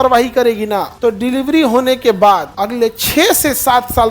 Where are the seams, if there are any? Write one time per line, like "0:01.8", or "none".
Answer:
0:00.9
0:02.5